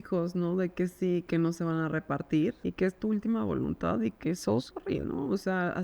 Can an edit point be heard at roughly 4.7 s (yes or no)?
no